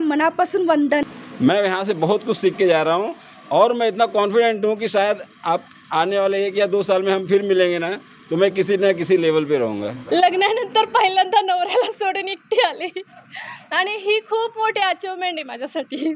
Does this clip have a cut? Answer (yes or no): yes